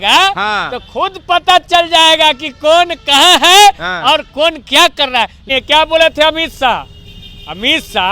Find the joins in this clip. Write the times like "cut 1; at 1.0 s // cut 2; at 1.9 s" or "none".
cut 1; at 5.4 s